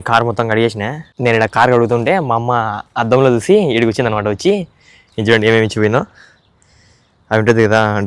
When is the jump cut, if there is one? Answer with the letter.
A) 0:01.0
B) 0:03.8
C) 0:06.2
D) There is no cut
A